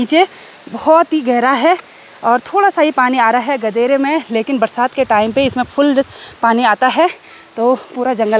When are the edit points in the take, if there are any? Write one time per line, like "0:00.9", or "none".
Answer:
none